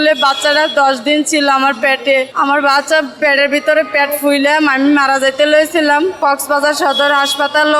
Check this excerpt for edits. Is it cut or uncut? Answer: uncut